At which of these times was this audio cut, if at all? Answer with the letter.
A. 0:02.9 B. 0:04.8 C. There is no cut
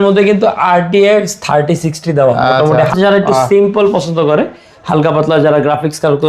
A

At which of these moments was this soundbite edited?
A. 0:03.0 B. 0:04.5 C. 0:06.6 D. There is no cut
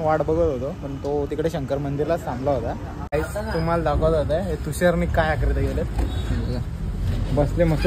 A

